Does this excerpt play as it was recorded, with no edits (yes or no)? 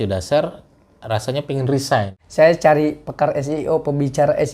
no